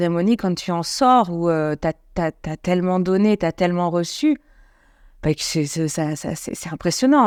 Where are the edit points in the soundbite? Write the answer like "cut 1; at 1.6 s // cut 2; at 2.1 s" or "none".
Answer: none